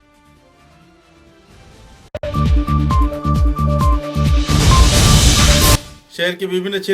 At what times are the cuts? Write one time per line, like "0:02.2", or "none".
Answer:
0:02.2
0:05.8

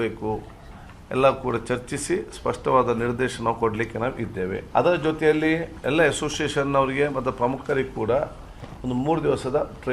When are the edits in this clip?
0:04.6

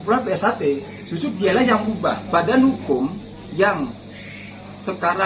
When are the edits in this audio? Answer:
0:02.2

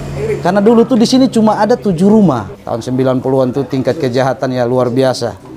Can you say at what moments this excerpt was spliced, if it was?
0:02.5

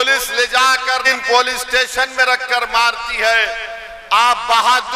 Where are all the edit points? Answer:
0:01.0

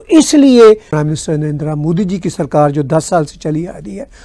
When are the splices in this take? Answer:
0:00.9

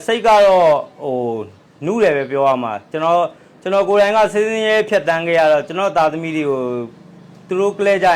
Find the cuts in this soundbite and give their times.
none

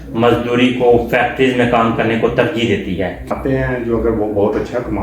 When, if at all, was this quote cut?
0:03.3

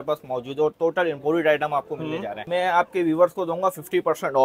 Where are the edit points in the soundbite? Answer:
0:02.4

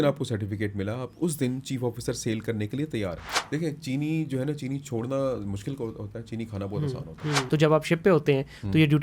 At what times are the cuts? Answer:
0:03.2
0:07.5

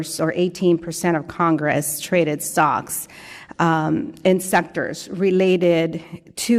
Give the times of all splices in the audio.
none

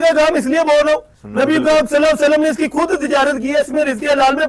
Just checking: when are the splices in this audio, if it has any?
0:01.2

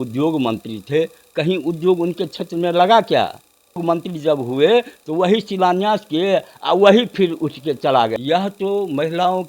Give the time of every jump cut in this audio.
0:03.8
0:08.1

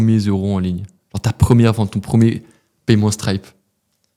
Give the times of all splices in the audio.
none

